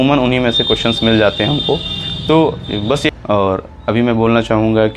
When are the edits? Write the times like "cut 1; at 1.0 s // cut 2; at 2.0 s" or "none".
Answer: cut 1; at 3.1 s